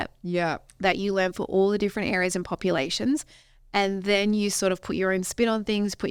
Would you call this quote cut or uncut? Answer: uncut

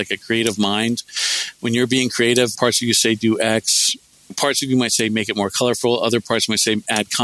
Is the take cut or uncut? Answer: cut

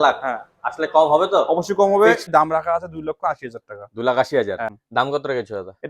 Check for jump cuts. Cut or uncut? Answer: cut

